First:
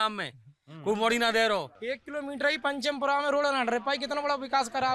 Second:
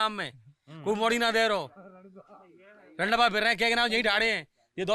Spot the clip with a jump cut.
first; 1 cut; at 1.7 s

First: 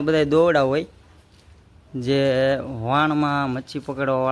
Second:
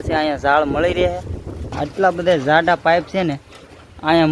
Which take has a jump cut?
second; 1 cut; at 1.8 s

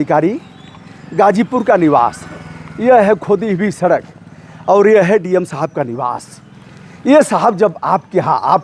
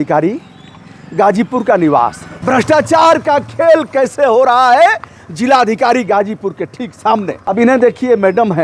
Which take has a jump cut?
second; 2 cuts; at 2.3 s, 7.5 s

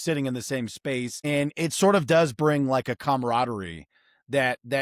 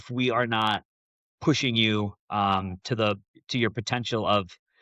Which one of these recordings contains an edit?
first; 1 cut; at 1.1 s

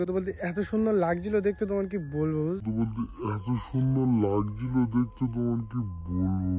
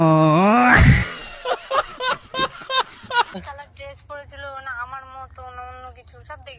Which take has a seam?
second; 1 cut; at 3.4 s

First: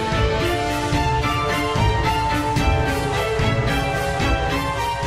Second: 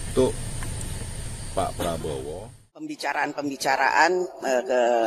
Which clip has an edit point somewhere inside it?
second; 1 cut; at 2.9 s

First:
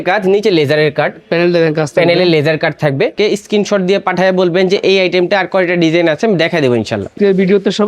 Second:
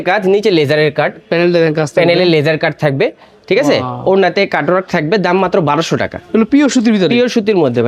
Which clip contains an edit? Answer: first; 2 cuts; at 3.1 s, 7.1 s

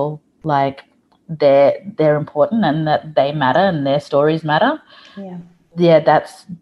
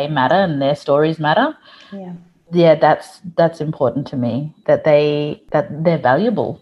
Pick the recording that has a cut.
second; 2 cuts; at 4.5 s, 5.4 s

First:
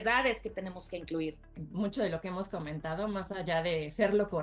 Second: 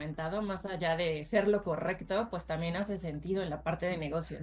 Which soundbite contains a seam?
first; 1 cut; at 1.5 s

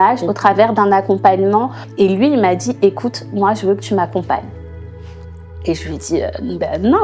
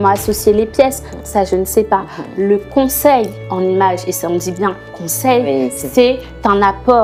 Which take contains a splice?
first; 1 cut; at 1.8 s

